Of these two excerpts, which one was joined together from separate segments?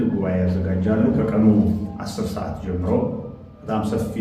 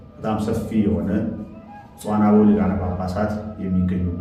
first; 1 cut; at 1.2 s

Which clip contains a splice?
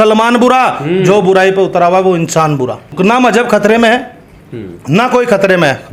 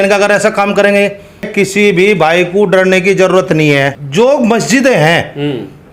second; 2 cuts; at 1.5 s, 4.0 s

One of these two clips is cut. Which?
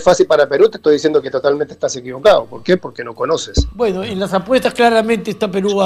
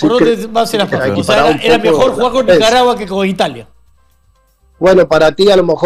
second; 1 cut; at 1.0 s

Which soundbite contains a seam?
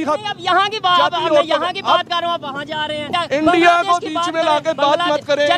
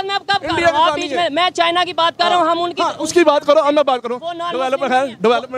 first; 1 cut; at 3.0 s

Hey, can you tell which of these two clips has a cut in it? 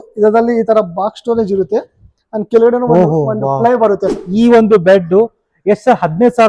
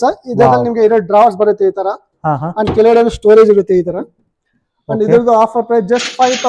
first; 1 cut; at 4.2 s

